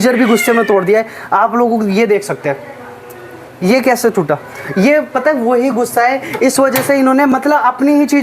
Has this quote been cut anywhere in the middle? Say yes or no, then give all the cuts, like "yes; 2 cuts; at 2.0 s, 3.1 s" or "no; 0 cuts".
no; 0 cuts